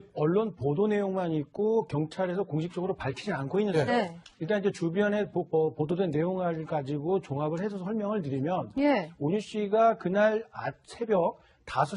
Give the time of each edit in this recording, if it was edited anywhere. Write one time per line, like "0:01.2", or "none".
0:04.4